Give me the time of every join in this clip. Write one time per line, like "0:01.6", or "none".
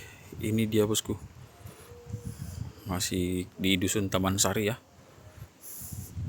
none

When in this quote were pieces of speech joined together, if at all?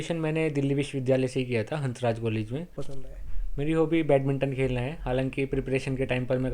0:02.9

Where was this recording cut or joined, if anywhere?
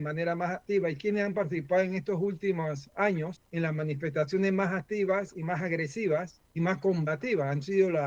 0:03.4
0:06.4

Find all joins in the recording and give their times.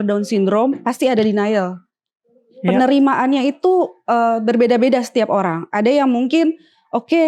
none

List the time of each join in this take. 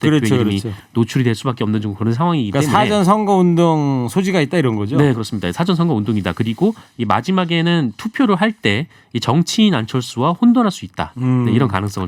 none

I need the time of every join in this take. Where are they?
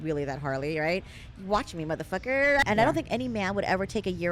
0:02.6

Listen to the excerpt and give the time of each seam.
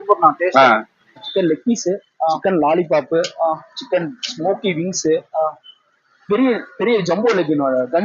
0:01.2

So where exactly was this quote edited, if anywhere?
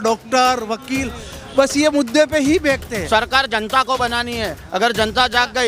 0:02.9

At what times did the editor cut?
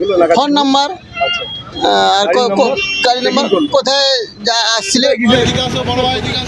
0:05.4

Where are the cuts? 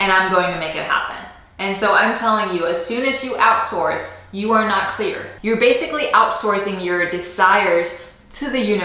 0:05.3

